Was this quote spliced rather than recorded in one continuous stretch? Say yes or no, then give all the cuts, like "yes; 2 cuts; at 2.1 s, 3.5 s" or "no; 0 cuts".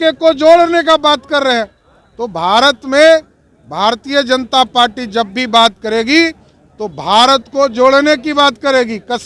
no; 0 cuts